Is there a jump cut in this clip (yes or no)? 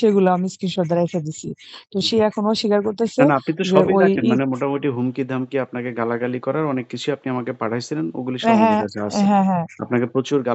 no